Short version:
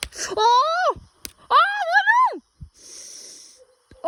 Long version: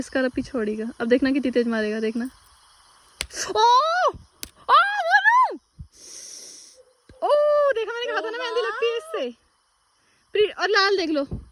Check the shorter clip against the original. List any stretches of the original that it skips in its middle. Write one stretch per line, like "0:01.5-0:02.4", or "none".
none